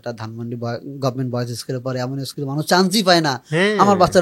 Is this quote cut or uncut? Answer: uncut